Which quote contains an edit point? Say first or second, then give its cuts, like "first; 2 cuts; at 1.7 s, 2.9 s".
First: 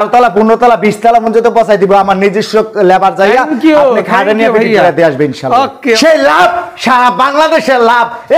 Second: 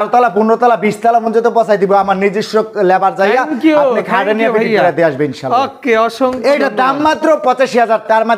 first; 1 cut; at 6.0 s